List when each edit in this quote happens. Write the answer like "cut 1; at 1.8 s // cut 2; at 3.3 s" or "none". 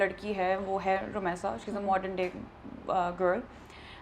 none